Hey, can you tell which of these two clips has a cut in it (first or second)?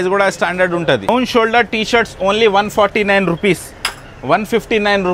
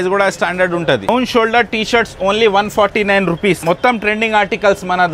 second